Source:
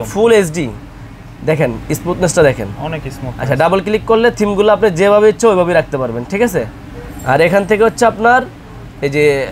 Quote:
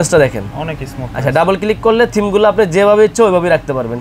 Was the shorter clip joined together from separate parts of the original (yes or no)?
no